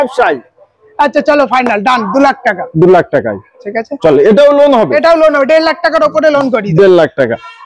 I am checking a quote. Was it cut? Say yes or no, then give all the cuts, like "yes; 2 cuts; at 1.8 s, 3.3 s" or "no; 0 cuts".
no; 0 cuts